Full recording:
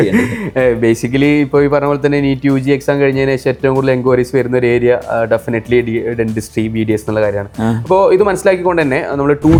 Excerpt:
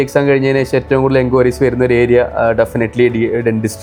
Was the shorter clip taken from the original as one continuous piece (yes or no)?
yes